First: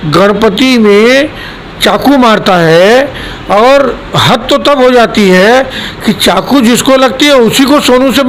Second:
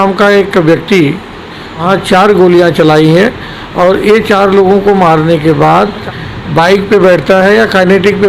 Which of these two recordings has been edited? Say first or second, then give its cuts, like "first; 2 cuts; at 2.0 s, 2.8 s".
second; 2 cuts; at 1.8 s, 6.0 s